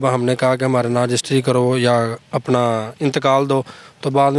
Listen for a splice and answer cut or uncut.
uncut